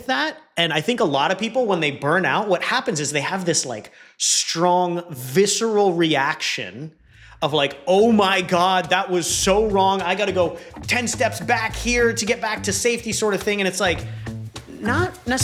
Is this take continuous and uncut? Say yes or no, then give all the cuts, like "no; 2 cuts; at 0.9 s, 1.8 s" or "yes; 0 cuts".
yes; 0 cuts